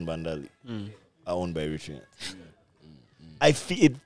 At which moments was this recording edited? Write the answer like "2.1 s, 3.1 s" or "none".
none